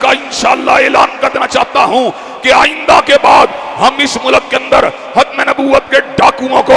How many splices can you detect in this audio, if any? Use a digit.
0